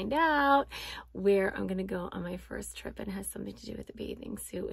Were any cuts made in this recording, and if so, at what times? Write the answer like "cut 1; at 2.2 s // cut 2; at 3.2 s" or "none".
none